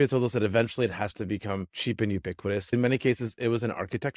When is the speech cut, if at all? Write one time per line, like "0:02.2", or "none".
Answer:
0:02.7